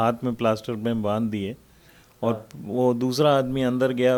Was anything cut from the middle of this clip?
no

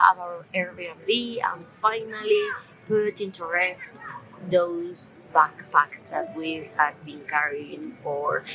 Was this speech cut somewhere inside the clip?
no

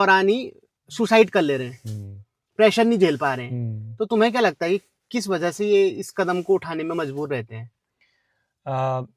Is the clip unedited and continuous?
yes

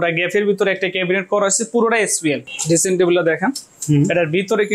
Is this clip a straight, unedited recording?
no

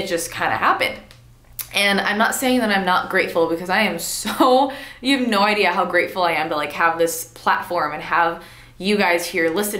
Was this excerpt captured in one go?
yes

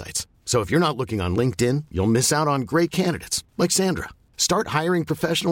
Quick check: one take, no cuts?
yes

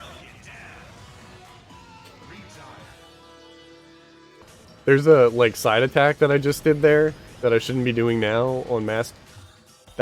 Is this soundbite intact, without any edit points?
no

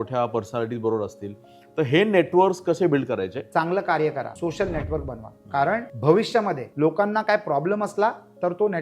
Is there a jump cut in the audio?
yes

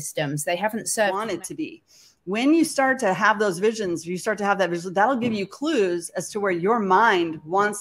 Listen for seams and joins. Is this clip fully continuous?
no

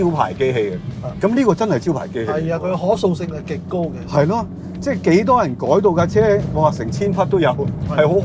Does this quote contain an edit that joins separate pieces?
no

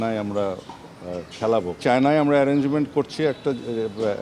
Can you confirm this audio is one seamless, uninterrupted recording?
no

